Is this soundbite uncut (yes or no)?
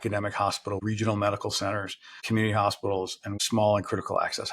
no